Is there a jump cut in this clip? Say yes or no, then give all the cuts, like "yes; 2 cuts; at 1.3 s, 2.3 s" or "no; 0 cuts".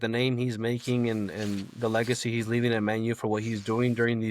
no; 0 cuts